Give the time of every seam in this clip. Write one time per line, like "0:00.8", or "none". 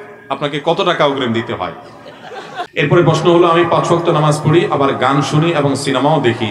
0:02.6